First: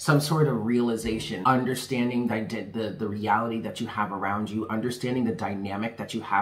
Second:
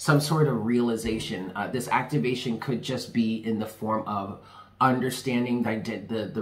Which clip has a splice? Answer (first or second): first